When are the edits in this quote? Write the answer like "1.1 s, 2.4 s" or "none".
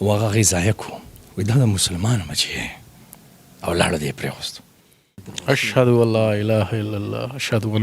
5.2 s

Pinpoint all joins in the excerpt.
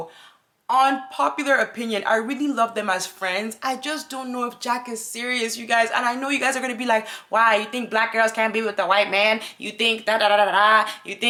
none

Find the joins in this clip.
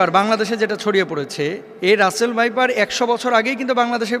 1.7 s

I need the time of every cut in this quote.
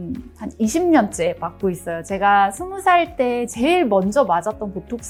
none

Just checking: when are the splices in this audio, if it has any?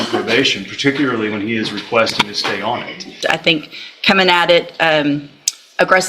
3.1 s

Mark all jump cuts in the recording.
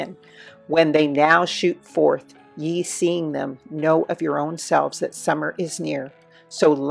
none

